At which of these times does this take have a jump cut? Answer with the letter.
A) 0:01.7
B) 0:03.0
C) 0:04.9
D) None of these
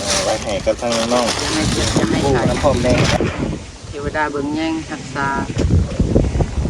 B